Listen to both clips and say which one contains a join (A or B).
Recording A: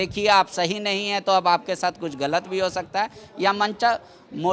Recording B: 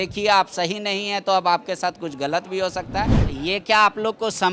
B